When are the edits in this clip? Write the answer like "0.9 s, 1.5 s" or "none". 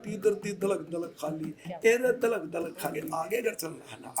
3.0 s

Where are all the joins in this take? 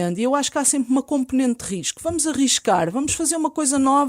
none

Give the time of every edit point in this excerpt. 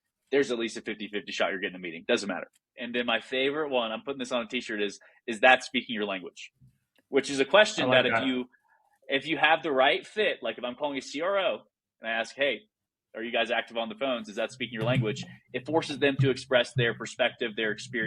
2.6 s

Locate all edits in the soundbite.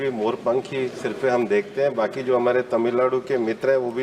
none

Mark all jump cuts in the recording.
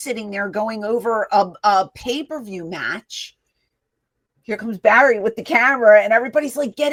none

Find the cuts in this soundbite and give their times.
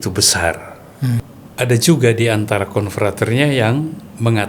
1.2 s

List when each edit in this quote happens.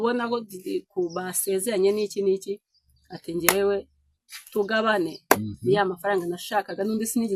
none

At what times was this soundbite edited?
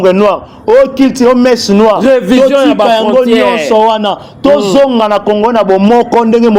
none

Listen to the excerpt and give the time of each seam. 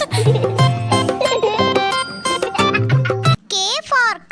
3.4 s

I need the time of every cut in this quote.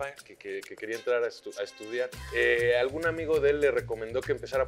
2.2 s

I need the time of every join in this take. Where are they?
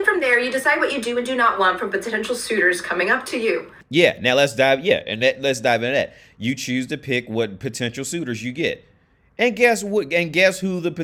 none

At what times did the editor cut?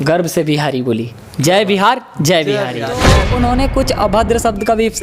3.2 s

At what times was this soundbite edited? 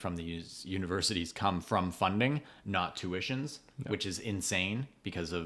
none

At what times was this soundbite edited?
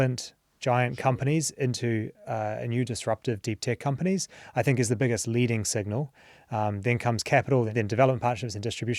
7.7 s

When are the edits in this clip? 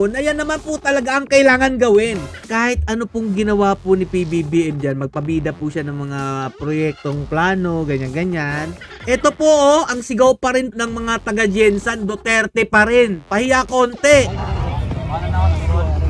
2.5 s, 8.9 s, 10.7 s

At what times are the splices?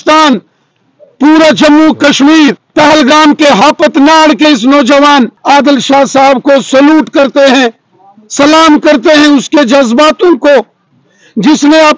2.6 s, 5.4 s

